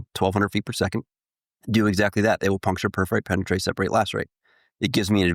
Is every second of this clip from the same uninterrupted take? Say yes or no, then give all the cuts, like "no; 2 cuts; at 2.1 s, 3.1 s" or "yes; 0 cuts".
yes; 0 cuts